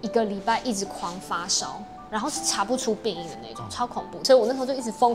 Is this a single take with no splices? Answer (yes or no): no